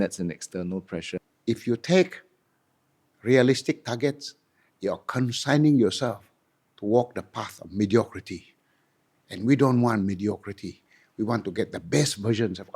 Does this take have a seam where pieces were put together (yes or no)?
yes